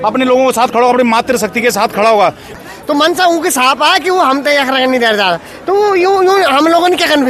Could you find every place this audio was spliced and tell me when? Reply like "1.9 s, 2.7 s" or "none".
2.6 s

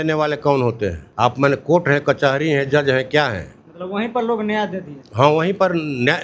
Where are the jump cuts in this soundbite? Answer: 1.0 s

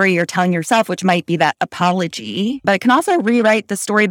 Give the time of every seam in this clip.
2.6 s

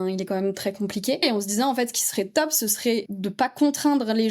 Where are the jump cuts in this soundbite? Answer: 1.2 s, 3.1 s

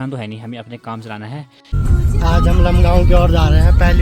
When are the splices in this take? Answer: 1.8 s

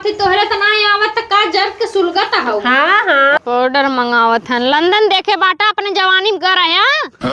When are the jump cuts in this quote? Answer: 3.4 s

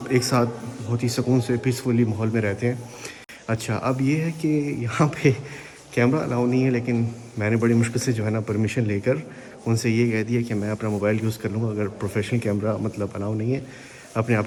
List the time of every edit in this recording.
none

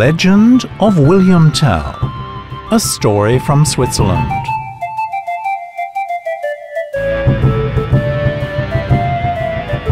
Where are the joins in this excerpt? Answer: 4.2 s

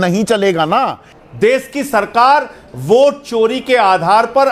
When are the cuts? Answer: 1.1 s

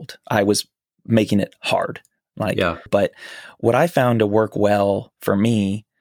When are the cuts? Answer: 2.9 s

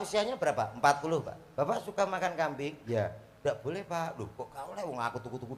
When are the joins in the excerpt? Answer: none

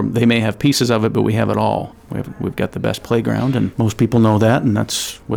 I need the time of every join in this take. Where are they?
2.0 s, 3.7 s

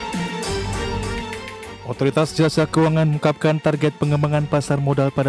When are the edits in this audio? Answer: none

